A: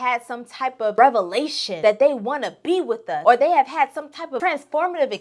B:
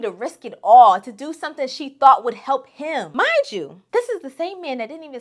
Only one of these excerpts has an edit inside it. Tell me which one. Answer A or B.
A